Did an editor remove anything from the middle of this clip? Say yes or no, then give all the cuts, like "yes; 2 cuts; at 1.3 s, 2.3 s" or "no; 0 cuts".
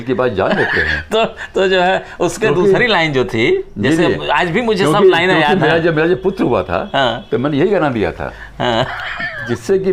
no; 0 cuts